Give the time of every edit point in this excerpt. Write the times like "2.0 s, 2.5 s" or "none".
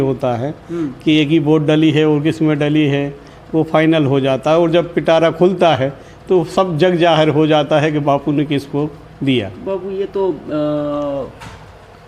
none